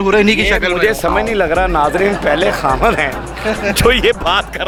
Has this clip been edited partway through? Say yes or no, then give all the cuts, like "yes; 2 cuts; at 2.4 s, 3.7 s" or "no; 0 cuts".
no; 0 cuts